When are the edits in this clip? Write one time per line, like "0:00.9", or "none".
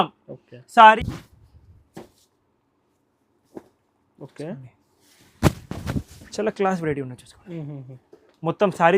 0:01.0